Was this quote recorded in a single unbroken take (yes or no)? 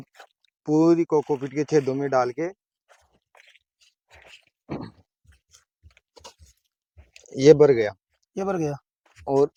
yes